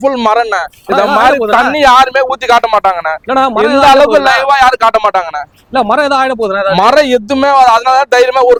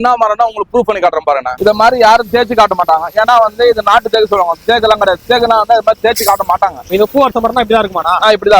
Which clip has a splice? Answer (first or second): second